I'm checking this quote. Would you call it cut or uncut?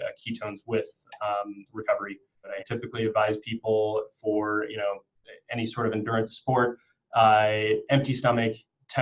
cut